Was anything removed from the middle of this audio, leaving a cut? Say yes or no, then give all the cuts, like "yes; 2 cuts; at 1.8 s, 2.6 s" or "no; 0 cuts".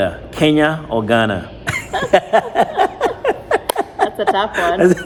no; 0 cuts